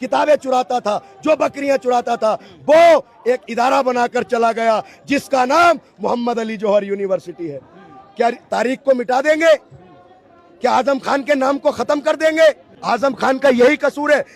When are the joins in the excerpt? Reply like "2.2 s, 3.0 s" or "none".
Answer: 12.7 s